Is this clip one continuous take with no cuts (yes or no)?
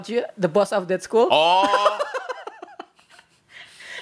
yes